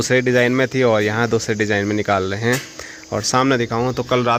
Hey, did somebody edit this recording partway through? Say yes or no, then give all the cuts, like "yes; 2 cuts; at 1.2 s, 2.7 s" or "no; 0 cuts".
no; 0 cuts